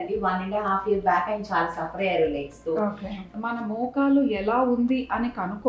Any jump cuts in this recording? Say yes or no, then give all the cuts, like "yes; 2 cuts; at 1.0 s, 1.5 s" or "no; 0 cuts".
yes; 1 cut; at 3.3 s